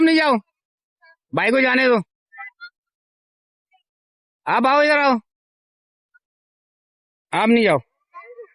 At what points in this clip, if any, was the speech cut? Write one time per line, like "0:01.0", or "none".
none